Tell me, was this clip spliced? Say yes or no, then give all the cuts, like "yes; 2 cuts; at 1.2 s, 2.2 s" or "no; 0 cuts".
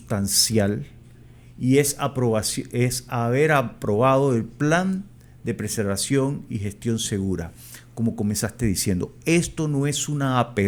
no; 0 cuts